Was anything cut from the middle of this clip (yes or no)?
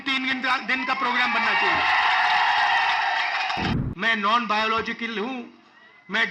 yes